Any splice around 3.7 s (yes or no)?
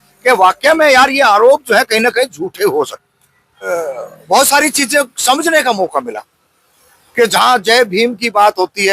yes